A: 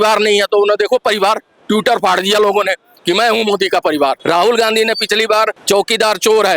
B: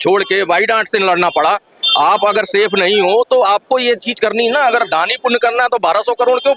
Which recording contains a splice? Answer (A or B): A